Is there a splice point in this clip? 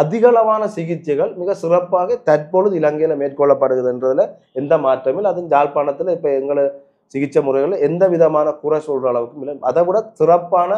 no; 0 cuts

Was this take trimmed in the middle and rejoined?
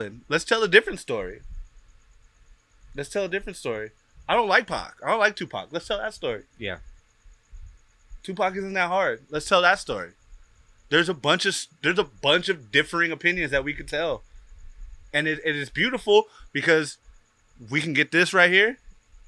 no; 0 cuts

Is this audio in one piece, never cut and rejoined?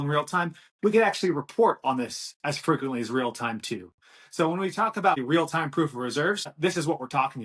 no; 2 cuts; at 5.2 s, 6.5 s

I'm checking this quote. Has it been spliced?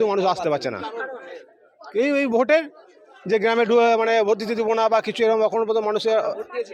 no; 0 cuts

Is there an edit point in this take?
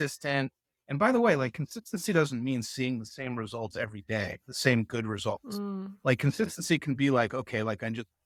no; 0 cuts

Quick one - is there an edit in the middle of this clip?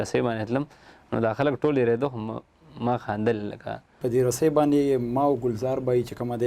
yes; 1 cut; at 4.0 s

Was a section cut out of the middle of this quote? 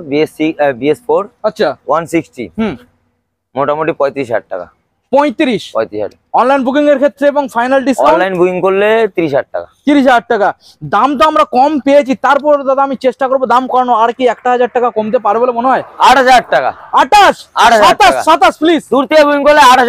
no; 0 cuts

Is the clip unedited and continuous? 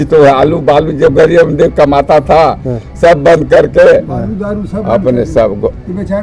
yes; 0 cuts

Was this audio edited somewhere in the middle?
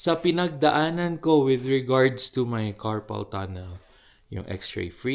no; 0 cuts

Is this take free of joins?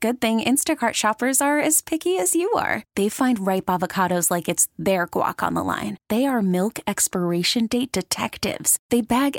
yes; 0 cuts

